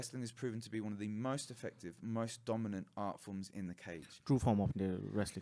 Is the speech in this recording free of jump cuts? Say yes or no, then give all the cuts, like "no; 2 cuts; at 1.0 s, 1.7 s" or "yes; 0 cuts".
yes; 0 cuts